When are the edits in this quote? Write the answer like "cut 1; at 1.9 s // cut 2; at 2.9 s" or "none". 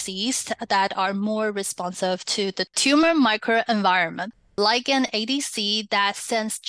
cut 1; at 4.6 s